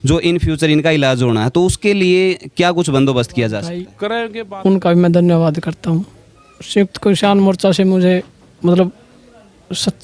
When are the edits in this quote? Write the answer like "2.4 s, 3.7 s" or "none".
4.3 s